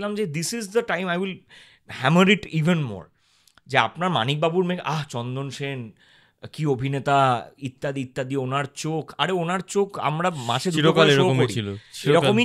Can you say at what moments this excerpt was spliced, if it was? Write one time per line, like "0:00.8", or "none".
none